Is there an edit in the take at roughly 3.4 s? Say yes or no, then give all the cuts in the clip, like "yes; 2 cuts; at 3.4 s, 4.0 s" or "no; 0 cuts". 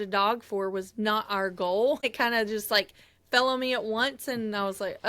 no; 1 cut; at 2.0 s